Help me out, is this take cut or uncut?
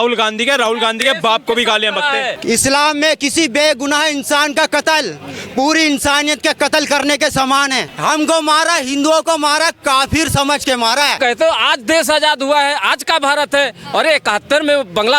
cut